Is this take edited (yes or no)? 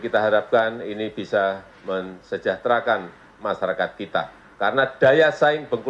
no